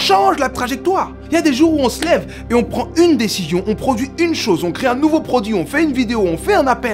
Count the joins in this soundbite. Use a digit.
1